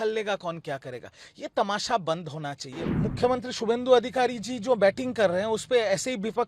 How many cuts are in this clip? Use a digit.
1